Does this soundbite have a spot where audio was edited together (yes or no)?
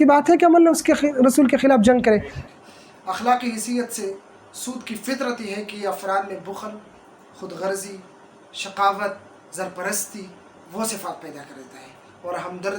yes